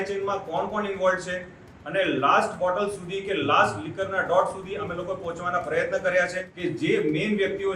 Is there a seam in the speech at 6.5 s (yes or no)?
yes